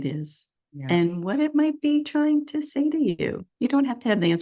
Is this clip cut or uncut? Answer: uncut